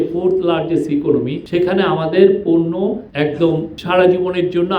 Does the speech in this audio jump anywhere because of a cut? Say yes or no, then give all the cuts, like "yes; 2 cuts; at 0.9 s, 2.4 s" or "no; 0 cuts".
yes; 3 cuts; at 1.4 s, 3.1 s, 3.7 s